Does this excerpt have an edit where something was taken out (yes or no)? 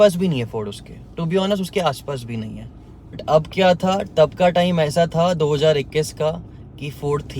yes